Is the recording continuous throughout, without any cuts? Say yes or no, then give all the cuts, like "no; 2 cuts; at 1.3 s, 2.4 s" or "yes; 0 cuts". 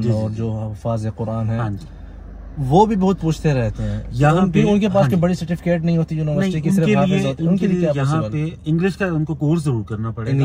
yes; 0 cuts